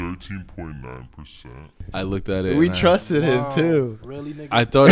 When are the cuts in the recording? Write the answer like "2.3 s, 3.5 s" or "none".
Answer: none

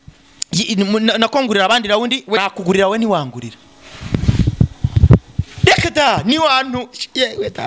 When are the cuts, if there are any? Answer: 2.4 s

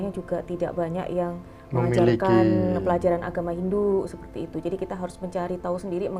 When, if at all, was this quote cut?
none

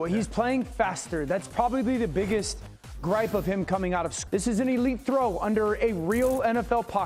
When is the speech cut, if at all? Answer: 4.2 s

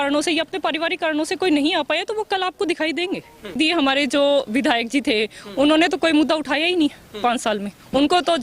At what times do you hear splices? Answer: 3.6 s

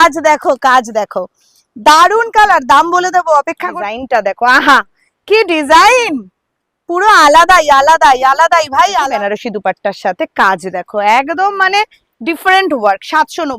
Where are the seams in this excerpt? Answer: 3.7 s, 9.1 s

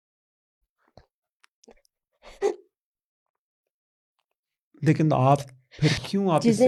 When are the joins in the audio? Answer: none

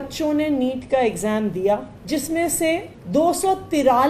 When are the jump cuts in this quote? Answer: 1.9 s, 2.9 s

